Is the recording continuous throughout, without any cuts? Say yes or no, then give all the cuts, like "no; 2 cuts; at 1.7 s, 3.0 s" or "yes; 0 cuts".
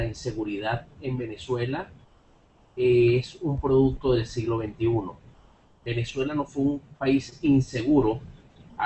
no; 1 cut; at 1.5 s